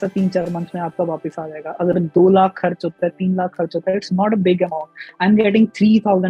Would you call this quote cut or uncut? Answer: uncut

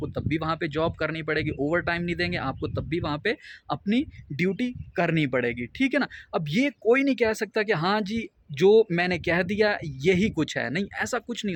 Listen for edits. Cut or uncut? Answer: uncut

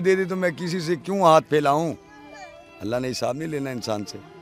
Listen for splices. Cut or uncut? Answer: uncut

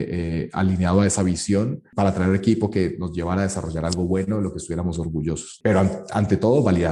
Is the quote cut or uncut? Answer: cut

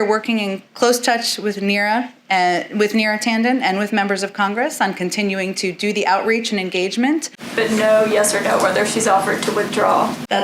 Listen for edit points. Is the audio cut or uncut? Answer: cut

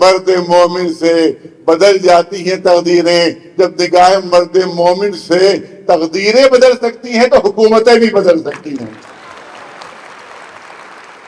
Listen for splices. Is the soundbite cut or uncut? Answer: uncut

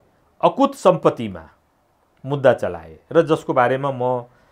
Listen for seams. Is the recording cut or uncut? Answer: uncut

